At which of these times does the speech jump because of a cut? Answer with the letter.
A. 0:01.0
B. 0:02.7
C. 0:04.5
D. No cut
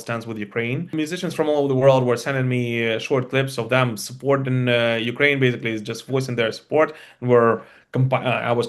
A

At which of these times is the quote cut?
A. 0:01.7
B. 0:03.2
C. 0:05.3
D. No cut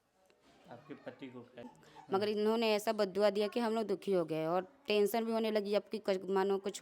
A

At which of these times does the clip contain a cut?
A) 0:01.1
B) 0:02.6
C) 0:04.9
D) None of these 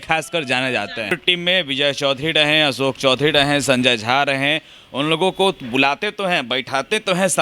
A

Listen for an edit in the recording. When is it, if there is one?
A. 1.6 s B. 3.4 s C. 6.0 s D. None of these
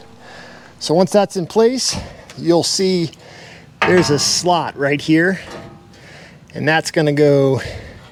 D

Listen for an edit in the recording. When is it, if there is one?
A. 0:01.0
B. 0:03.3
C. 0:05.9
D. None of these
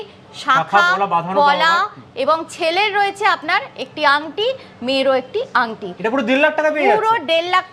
D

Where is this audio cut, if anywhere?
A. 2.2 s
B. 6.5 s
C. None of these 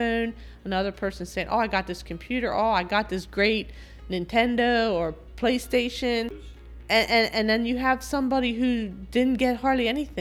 B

